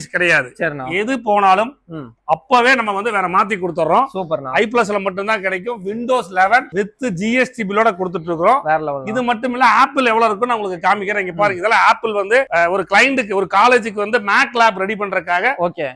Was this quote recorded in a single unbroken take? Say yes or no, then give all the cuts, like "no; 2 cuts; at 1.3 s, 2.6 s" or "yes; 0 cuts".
yes; 0 cuts